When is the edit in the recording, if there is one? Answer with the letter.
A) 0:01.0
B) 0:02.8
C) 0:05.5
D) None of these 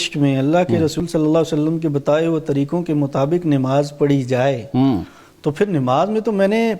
A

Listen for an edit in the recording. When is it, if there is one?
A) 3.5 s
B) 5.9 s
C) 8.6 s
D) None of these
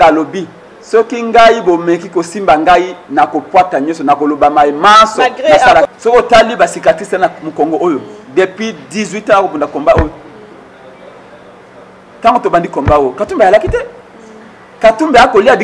B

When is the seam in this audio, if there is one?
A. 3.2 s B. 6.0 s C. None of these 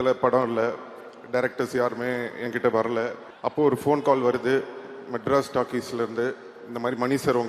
A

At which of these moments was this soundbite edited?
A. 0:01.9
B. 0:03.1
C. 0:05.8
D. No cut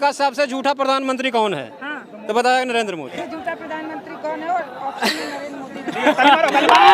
B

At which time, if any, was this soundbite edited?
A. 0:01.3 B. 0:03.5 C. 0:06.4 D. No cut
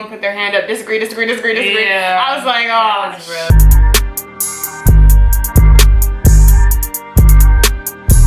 B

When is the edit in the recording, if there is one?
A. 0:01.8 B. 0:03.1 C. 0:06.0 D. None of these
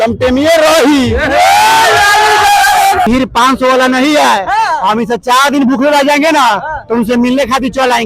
B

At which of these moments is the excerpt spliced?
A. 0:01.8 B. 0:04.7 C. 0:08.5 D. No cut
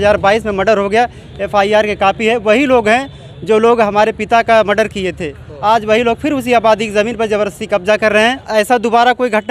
C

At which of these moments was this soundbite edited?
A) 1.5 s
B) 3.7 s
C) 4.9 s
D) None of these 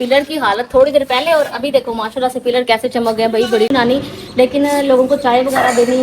B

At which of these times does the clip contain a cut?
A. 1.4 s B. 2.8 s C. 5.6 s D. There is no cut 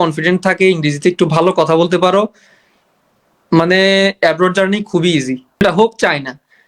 C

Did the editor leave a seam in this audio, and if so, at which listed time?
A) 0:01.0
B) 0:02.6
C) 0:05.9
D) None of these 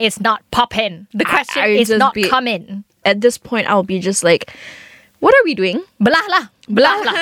A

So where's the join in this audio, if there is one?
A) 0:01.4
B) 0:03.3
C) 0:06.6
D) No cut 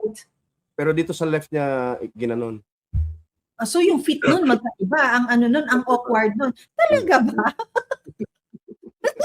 C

